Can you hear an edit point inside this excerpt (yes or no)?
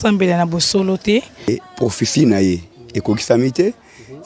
yes